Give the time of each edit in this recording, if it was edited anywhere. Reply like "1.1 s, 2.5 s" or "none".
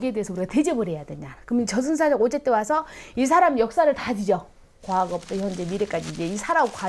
none

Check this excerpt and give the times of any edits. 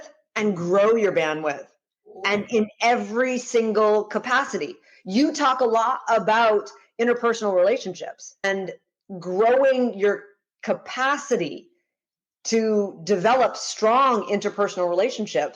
8.4 s

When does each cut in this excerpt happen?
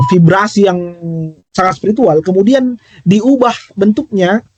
none

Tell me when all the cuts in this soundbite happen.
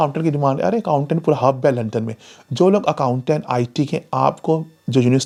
none

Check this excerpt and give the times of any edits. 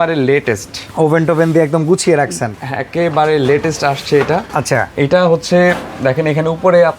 none

